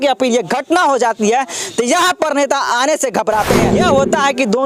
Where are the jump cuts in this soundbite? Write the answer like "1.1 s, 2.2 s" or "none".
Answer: 3.7 s

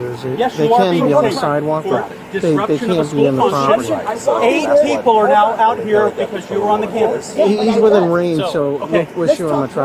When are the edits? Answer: none

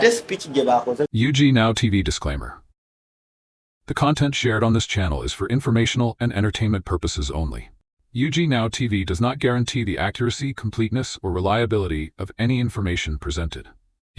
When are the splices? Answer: 1.1 s

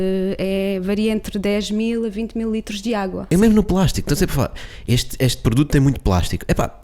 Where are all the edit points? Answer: 3.2 s

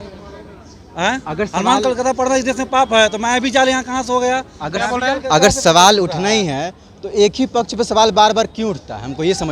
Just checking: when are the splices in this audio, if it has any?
none

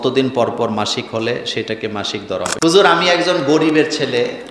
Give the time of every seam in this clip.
2.5 s

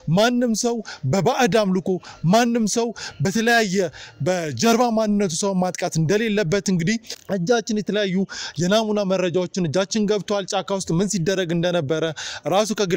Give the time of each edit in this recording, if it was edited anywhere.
7.1 s

